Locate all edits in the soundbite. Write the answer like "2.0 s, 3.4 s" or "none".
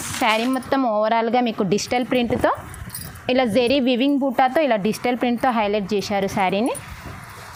none